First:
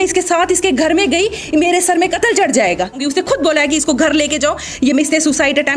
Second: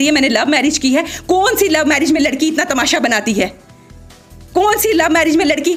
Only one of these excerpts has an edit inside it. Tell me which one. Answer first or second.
first